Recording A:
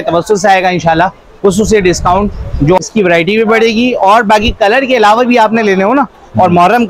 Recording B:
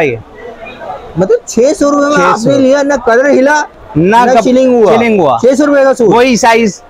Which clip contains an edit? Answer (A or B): A